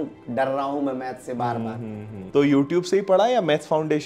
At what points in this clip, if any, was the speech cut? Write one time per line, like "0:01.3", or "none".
0:02.2